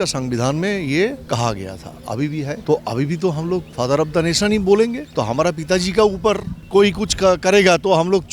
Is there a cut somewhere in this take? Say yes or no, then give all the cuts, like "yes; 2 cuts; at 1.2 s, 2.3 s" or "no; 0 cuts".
yes; 5 cuts; at 1.2 s, 2.6 s, 3.7 s, 5.0 s, 6.5 s